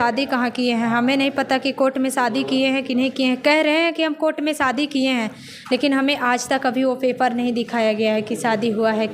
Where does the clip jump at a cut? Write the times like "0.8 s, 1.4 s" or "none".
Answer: 7.4 s